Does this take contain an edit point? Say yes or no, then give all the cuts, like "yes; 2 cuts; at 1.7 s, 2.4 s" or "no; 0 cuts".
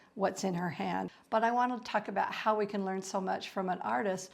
yes; 1 cut; at 1.1 s